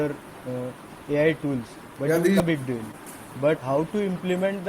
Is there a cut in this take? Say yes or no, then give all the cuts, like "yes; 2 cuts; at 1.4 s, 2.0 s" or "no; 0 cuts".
yes; 2 cuts; at 2.4 s, 3.6 s